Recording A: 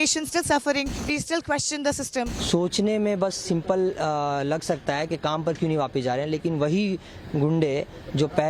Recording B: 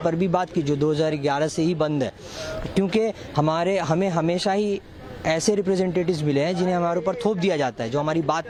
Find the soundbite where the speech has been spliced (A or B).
A